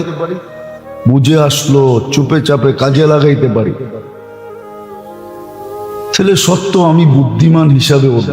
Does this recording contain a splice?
yes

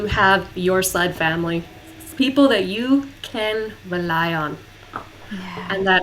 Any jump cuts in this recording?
no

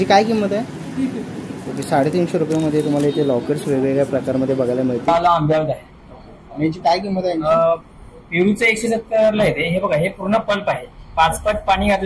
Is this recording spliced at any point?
yes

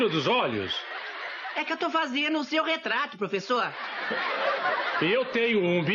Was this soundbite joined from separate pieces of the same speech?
yes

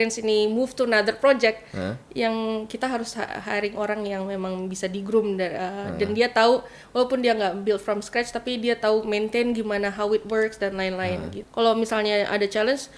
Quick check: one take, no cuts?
no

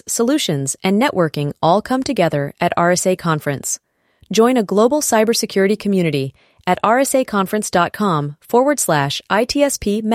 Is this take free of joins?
yes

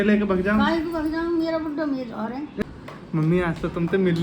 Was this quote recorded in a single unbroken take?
no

